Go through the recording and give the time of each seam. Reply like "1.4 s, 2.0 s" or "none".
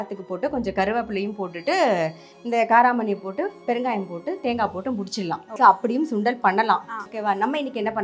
5.5 s, 7.0 s